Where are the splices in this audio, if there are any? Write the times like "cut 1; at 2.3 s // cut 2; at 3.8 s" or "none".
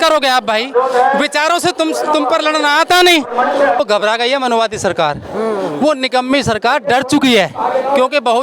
cut 1; at 3.8 s